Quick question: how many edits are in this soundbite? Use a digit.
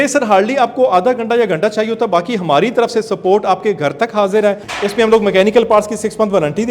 1